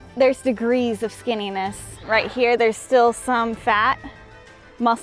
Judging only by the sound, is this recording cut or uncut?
uncut